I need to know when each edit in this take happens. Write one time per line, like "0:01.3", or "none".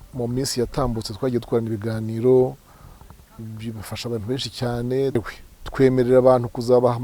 0:05.2